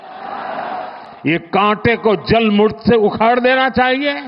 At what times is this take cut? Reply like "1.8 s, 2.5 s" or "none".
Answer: 1.1 s